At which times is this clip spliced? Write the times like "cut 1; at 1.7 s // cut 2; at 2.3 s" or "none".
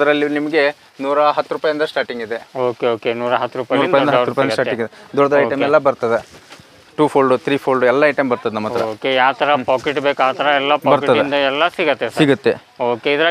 none